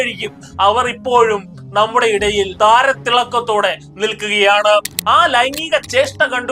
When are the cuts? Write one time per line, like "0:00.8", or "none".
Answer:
0:02.5
0:04.9